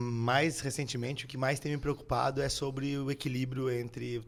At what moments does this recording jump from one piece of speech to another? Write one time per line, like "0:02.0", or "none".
none